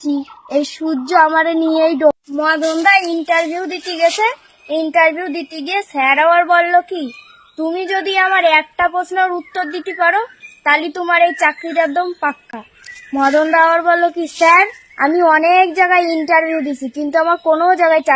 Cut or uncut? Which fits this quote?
cut